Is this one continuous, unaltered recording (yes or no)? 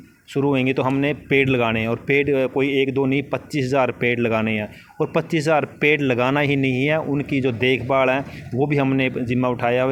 yes